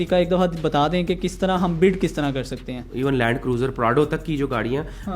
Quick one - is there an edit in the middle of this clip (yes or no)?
yes